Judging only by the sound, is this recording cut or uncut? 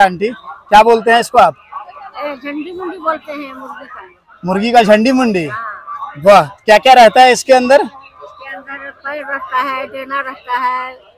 uncut